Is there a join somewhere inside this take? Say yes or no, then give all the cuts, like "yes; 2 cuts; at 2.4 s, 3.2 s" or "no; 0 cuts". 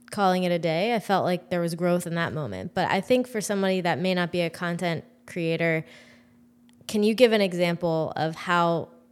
no; 0 cuts